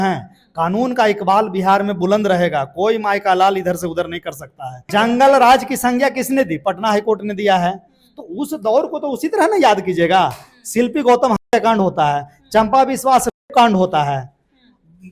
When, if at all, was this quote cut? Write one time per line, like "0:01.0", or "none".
0:04.8